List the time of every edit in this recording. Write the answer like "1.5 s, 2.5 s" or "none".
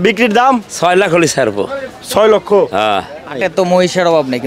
3.4 s